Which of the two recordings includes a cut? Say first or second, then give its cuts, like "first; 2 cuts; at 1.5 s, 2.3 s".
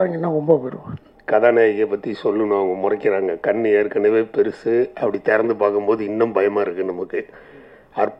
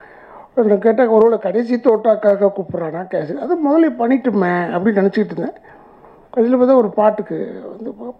first; 1 cut; at 1.2 s